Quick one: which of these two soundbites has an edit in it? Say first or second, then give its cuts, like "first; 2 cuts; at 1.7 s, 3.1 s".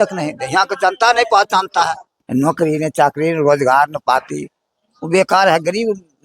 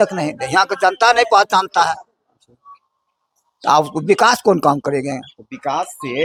first; 1 cut; at 2.1 s